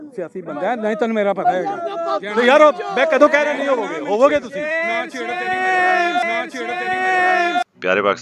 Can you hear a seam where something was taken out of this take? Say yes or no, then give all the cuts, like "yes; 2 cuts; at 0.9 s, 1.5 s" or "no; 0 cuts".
no; 0 cuts